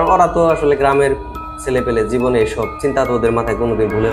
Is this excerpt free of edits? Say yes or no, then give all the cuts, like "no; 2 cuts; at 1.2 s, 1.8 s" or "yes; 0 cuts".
no; 1 cut; at 2.7 s